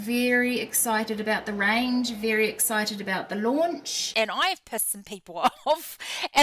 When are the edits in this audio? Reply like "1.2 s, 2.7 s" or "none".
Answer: 4.0 s